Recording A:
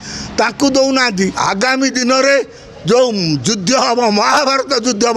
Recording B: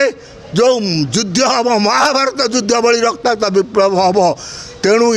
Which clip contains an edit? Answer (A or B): A